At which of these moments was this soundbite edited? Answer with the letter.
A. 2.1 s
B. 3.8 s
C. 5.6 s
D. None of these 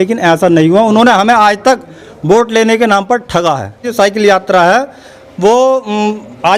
B